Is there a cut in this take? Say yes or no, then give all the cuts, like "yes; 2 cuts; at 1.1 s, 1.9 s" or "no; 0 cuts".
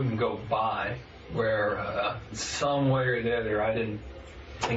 yes; 1 cut; at 2.5 s